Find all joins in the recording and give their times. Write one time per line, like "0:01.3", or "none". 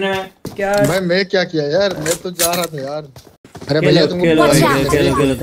0:03.6